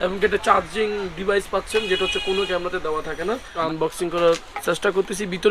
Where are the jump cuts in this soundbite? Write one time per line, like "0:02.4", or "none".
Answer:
0:03.6

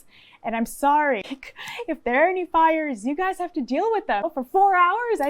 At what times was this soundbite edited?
0:01.3
0:04.3

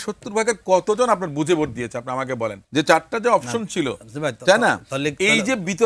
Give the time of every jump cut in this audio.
0:02.6

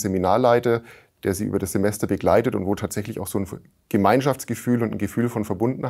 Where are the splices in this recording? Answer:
none

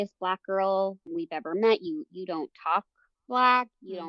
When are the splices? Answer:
0:01.1

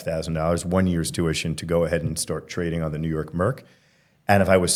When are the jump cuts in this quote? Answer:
none

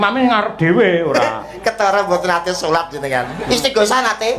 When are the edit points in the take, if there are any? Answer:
0:03.4

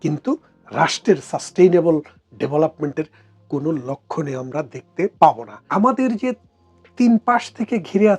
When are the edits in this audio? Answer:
0:05.5

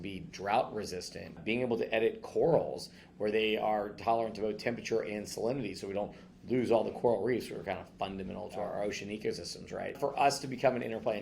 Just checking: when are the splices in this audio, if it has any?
0:01.4
0:08.6
0:10.0

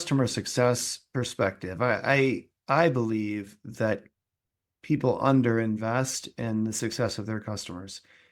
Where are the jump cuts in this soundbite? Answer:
none

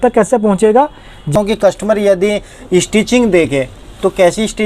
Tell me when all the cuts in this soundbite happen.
0:01.3

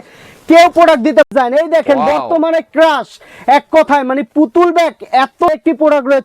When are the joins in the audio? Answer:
0:01.3
0:05.5

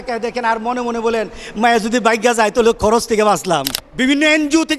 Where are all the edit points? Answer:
0:03.8

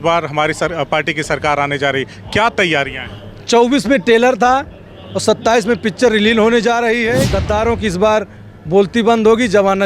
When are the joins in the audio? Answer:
0:07.3

